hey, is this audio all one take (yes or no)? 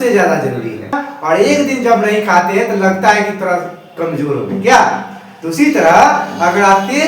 no